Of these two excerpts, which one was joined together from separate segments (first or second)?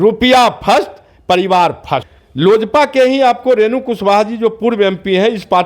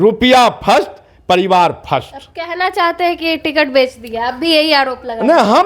first